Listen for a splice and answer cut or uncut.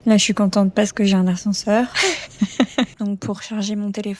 cut